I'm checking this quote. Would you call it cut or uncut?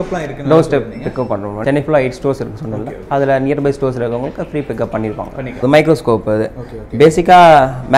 cut